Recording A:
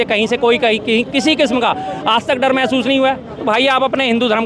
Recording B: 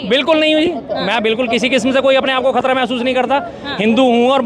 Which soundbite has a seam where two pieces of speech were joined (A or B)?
A